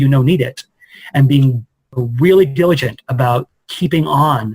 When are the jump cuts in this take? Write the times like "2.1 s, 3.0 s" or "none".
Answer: 1.9 s

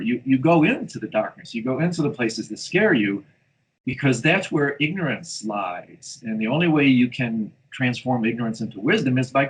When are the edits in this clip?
none

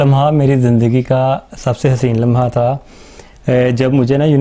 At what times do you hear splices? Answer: none

